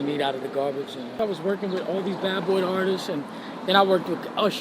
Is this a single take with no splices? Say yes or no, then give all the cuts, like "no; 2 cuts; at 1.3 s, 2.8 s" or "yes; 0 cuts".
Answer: no; 1 cut; at 1.1 s